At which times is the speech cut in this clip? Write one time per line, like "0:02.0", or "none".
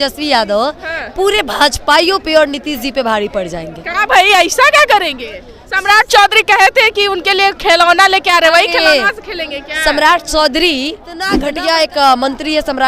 0:11.3